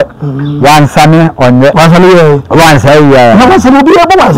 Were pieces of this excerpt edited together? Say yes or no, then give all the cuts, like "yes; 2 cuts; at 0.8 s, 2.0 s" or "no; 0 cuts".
yes; 1 cut; at 1.7 s